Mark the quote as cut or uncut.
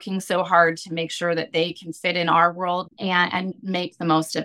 cut